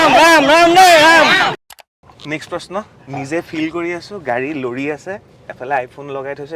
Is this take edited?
yes; 1 cut; at 1.5 s

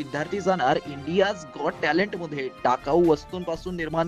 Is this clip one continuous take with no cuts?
yes; 0 cuts

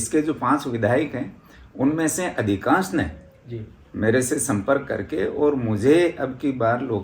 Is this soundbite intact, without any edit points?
yes; 0 cuts

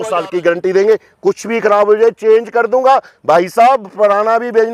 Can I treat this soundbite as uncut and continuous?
yes; 0 cuts

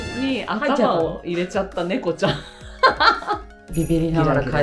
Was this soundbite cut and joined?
yes; 1 cut; at 3.6 s

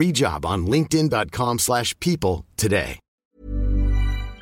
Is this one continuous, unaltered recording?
no; 1 cut; at 3.1 s

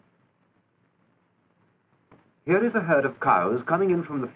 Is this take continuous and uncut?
yes; 0 cuts

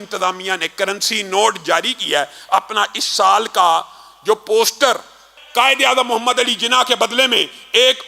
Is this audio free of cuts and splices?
no; 1 cut; at 5.3 s

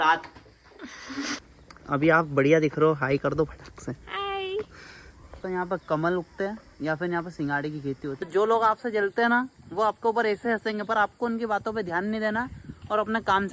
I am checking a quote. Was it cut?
yes; 3 cuts; at 1.4 s, 5.4 s, 8.3 s

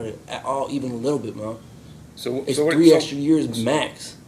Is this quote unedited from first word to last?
yes; 0 cuts

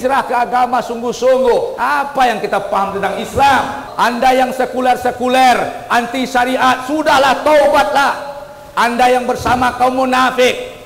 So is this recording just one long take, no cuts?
no; 2 cuts; at 1.7 s, 3.8 s

